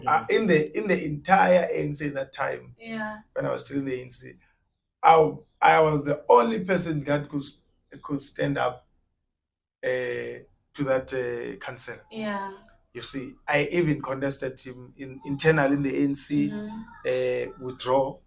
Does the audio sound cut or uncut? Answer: uncut